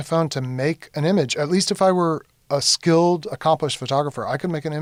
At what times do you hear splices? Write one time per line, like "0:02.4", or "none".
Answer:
none